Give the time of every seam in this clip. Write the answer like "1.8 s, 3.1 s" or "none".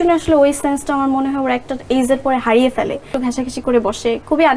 3.1 s